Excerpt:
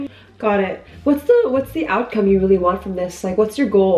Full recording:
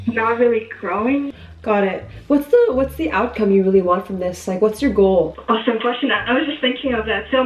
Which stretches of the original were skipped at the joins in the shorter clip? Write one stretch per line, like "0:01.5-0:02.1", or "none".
none